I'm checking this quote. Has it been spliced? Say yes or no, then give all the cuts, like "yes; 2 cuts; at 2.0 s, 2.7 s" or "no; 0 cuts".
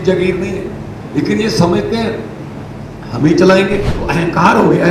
yes; 1 cut; at 3.9 s